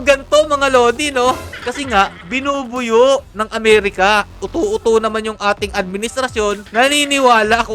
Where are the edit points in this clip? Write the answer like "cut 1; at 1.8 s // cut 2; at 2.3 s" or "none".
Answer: cut 1; at 1.6 s // cut 2; at 4.3 s // cut 3; at 6.6 s